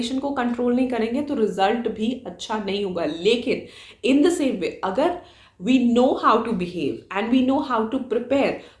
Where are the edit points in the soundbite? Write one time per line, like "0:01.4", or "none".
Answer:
none